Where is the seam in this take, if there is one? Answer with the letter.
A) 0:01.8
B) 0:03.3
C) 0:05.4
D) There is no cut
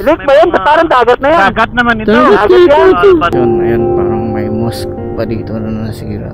B